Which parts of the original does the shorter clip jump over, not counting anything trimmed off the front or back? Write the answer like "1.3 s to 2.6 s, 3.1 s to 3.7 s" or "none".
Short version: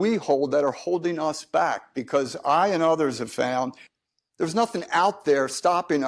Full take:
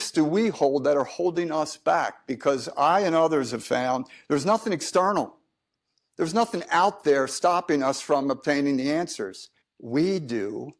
4.1 s to 5.6 s

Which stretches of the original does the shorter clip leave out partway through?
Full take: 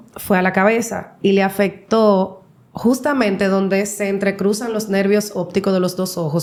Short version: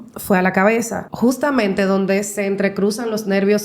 1.0 s to 2.6 s

